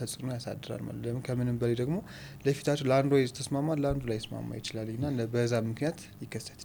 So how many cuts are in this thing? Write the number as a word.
zero